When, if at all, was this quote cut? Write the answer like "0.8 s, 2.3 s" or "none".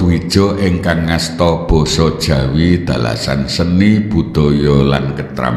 none